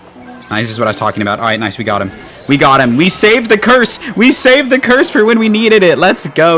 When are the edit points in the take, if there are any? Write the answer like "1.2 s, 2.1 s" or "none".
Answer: none